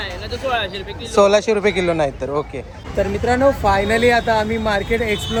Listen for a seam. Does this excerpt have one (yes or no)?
no